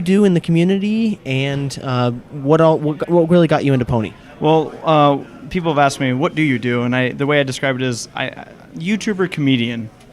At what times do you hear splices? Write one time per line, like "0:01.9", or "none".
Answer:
0:07.0